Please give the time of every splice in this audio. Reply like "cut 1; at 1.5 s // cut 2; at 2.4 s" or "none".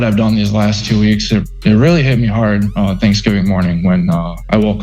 none